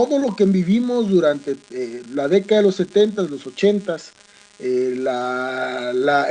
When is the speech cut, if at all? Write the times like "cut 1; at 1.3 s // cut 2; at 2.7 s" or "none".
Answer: cut 1; at 5.0 s

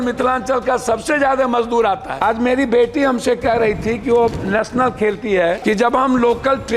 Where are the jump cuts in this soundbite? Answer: cut 1; at 2.1 s // cut 2; at 5.6 s

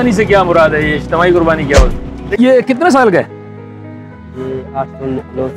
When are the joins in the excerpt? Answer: cut 1; at 2.2 s

